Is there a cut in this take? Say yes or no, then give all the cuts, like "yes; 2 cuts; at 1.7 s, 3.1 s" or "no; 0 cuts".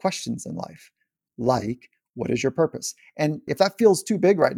yes; 1 cut; at 3.5 s